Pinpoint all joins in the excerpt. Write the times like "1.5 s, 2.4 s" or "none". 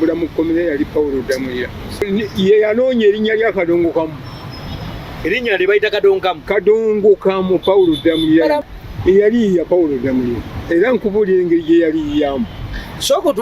2.0 s, 8.6 s